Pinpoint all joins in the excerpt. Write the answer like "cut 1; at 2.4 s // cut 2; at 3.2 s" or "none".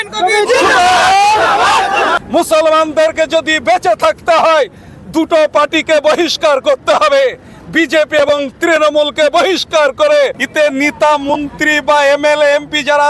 cut 1; at 2.2 s // cut 2; at 10.4 s